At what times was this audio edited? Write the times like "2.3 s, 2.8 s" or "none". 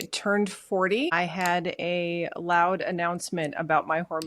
1.1 s